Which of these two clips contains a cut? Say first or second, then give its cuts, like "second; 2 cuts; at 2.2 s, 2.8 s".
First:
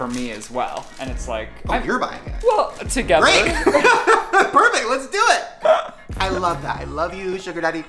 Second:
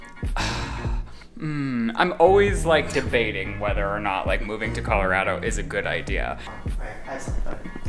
second; 1 cut; at 6.5 s